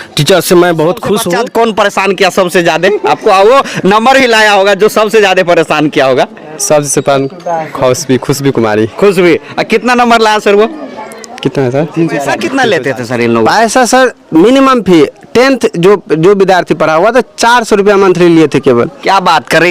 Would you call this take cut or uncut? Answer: cut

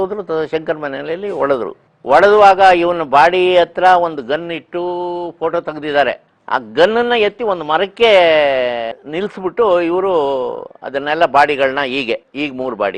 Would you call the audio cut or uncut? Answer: uncut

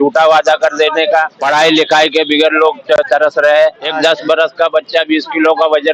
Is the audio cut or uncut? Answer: cut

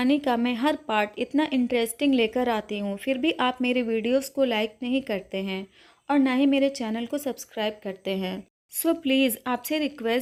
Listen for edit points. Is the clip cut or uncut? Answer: uncut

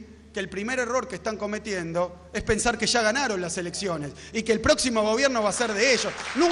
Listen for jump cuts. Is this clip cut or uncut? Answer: uncut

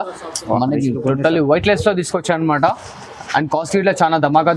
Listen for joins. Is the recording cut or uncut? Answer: uncut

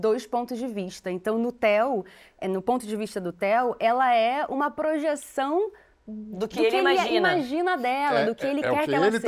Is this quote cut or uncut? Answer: uncut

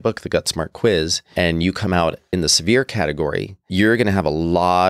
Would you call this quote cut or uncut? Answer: cut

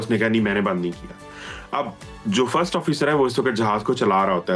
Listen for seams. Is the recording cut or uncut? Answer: uncut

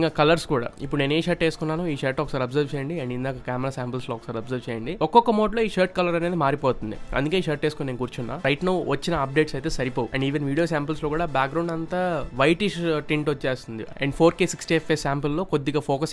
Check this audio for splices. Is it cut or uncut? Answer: cut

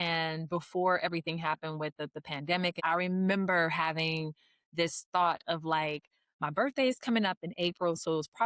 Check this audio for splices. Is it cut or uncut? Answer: cut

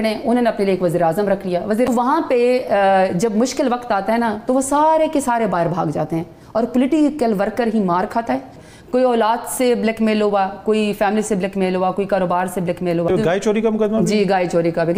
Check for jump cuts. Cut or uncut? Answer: cut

